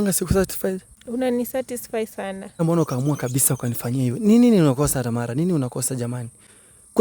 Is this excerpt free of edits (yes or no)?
no